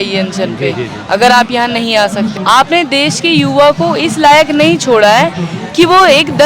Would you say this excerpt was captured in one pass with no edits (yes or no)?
no